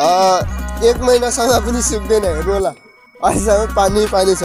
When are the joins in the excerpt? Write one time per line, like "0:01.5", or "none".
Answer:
none

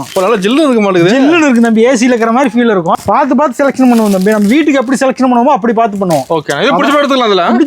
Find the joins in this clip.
0:03.0

